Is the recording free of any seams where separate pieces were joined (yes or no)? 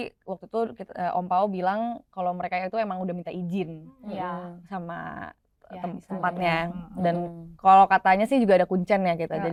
yes